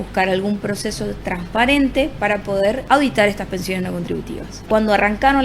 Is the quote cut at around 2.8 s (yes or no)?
yes